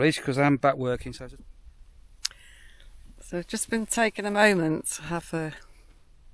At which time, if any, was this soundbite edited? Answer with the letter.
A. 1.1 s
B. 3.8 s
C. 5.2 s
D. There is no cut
A